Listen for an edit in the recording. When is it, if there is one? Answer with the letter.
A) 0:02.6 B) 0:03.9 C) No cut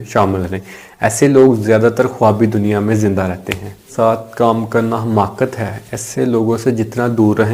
B